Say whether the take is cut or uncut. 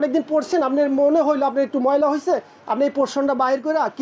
uncut